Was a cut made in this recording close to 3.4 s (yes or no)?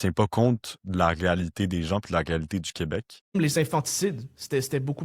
yes